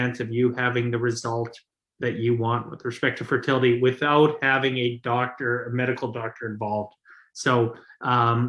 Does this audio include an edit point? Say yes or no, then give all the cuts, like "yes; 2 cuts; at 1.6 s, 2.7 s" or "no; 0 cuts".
no; 0 cuts